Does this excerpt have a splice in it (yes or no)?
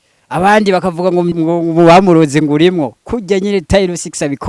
yes